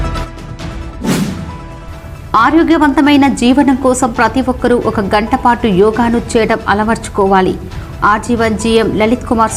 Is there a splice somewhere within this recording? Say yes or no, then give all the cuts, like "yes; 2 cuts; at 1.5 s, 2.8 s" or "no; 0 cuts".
no; 0 cuts